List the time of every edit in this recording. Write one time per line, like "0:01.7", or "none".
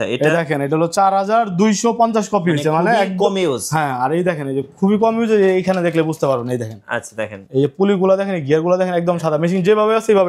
none